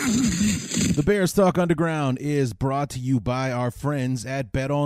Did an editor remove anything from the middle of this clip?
yes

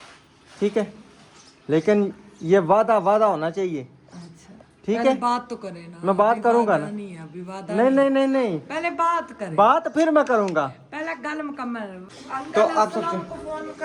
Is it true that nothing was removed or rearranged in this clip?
no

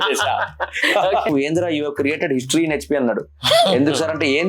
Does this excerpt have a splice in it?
yes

